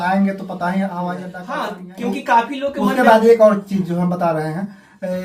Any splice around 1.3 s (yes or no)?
yes